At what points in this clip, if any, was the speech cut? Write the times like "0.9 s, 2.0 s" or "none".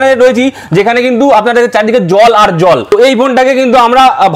2.9 s